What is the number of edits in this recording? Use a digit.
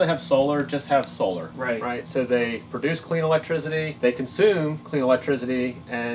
2